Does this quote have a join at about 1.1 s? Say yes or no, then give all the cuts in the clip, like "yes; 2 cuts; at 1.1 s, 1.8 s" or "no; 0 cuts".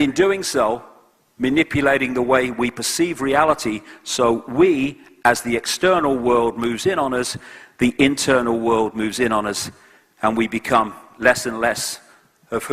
yes; 1 cut; at 1.1 s